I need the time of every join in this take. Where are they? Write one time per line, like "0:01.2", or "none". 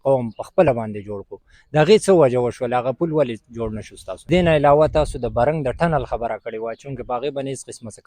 0:04.3